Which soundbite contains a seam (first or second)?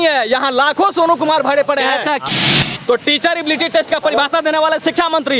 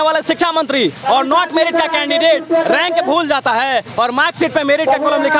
first